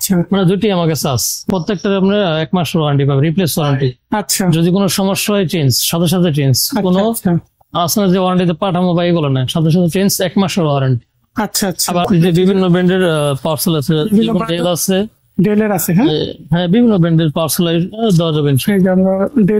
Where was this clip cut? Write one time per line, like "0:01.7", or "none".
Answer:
0:01.5
0:12.0